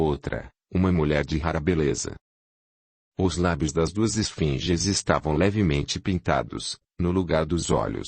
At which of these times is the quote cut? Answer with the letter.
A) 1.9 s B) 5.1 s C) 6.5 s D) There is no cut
C